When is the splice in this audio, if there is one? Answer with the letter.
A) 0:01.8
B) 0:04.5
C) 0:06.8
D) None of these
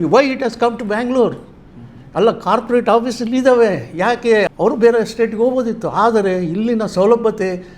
B